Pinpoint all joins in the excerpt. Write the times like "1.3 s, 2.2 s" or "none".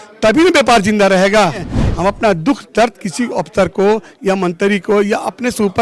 1.8 s